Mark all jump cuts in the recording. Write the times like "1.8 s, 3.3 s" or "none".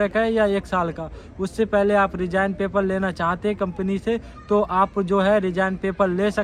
none

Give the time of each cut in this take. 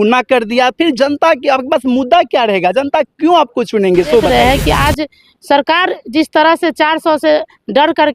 4.3 s

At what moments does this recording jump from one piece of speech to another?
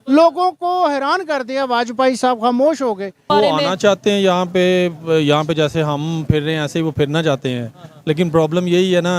3.2 s

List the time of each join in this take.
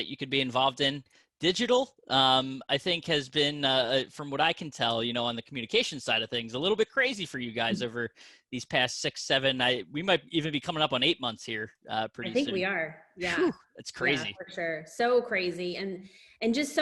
none

